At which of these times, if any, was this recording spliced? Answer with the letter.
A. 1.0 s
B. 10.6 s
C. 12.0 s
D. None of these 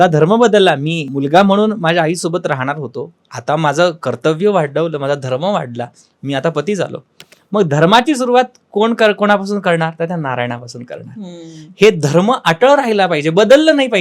A